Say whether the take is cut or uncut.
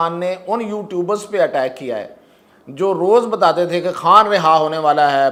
uncut